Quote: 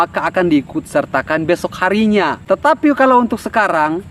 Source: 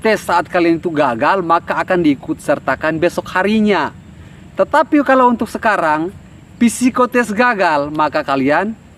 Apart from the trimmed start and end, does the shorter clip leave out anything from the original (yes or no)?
yes